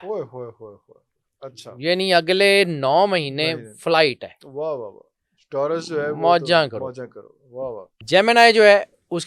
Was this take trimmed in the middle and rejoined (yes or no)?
yes